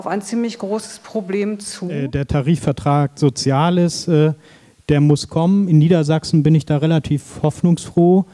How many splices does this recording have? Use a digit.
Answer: 1